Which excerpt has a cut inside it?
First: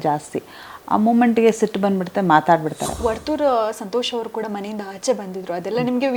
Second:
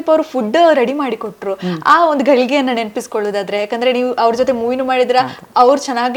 first; 1 cut; at 3.0 s

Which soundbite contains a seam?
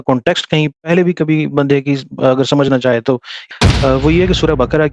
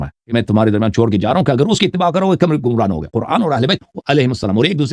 first; 1 cut; at 3.3 s

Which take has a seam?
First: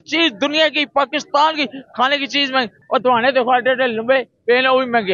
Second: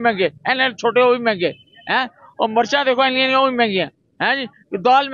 first; 1 cut; at 2.8 s

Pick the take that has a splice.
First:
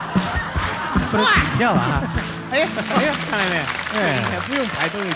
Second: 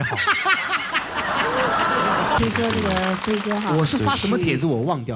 second; 1 cut; at 2.4 s

